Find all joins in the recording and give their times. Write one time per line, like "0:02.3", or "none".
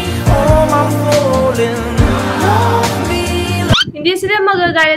0:03.9